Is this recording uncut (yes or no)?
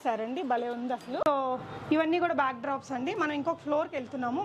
yes